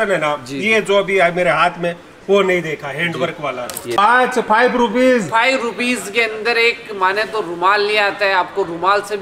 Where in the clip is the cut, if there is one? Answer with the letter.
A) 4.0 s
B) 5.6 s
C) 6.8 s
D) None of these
A